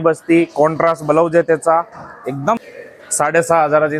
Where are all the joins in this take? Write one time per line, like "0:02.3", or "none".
0:02.6